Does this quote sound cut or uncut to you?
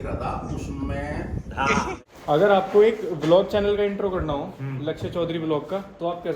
cut